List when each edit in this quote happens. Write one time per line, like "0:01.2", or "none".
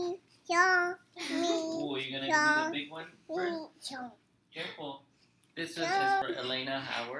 0:06.2